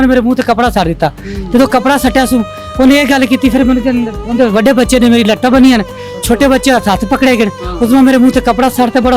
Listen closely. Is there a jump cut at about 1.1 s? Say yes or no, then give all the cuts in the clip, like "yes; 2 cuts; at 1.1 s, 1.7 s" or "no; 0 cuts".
no; 0 cuts